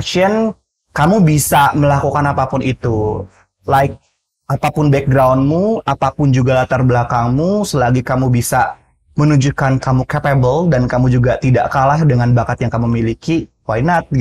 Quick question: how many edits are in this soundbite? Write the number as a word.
zero